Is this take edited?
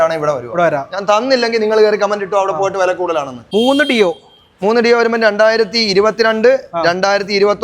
yes; 1 cut; at 3.4 s

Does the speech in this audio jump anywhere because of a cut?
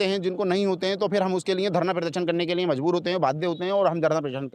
no; 0 cuts

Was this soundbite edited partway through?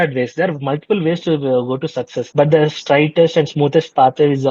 yes; 1 cut; at 2.2 s

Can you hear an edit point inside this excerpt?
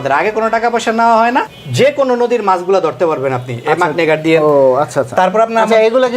yes; 1 cut; at 1.5 s

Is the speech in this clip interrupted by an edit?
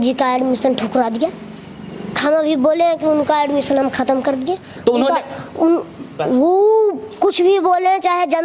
no; 0 cuts

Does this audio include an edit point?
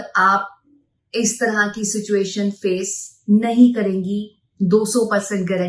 no; 0 cuts

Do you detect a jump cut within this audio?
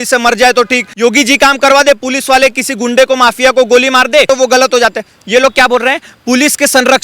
yes; 2 cuts; at 0.9 s, 4.3 s

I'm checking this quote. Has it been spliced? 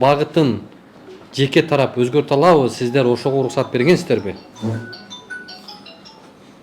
no; 0 cuts

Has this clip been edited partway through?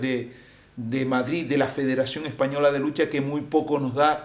no; 0 cuts

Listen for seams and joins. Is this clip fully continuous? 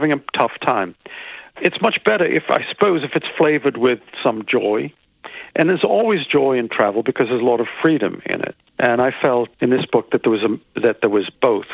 no; 3 cuts; at 1.5 s, 8.6 s, 9.5 s

